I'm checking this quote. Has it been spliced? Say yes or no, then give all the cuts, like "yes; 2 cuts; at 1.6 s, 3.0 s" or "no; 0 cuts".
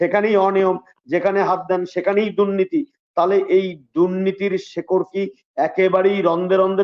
no; 0 cuts